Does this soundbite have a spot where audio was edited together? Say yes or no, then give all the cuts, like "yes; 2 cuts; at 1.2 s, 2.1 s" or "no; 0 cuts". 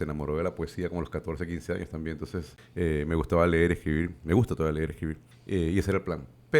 yes; 2 cuts; at 2.6 s, 5.3 s